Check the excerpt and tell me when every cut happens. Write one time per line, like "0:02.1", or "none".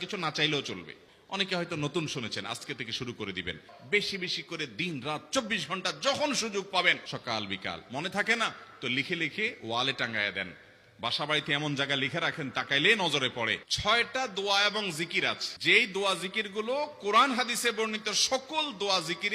0:01.0
0:03.7
0:07.1
0:13.6

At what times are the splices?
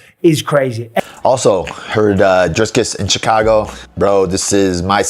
0:01.1

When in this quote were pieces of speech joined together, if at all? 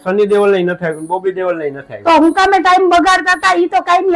none

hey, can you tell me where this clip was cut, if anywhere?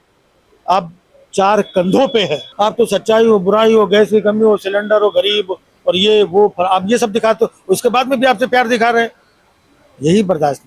0:02.4

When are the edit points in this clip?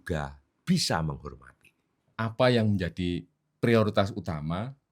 0:02.0

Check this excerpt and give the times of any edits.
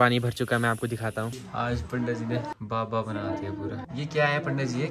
0:01.4
0:02.5
0:03.8

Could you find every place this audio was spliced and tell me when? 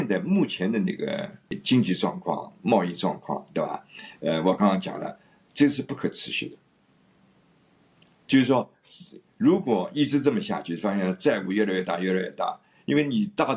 0:01.6

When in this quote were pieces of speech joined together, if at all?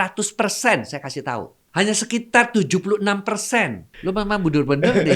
0:01.6
0:03.9

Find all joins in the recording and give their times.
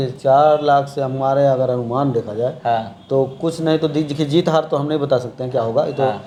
none

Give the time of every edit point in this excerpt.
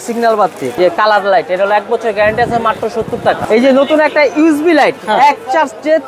0:00.8
0:03.4

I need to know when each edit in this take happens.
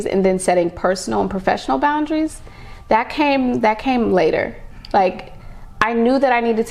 0:04.8

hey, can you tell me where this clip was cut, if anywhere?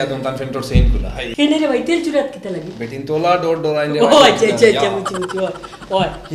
0:01.2

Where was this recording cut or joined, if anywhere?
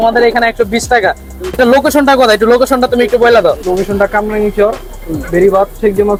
none

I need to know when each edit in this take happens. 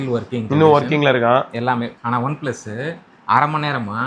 0:01.9

